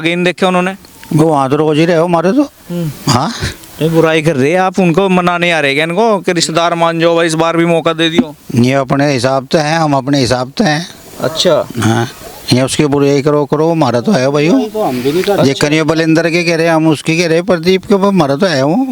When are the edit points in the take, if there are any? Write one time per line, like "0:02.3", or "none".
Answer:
none

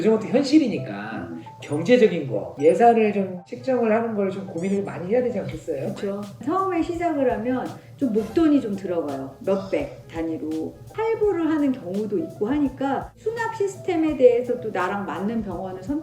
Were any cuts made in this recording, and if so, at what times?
0:06.4
0:10.9

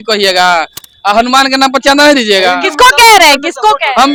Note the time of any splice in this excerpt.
none

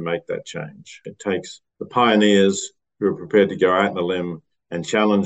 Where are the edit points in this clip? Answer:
0:01.2

